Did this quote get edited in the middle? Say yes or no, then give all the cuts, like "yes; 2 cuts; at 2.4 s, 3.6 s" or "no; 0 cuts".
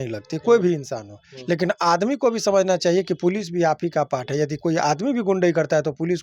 no; 0 cuts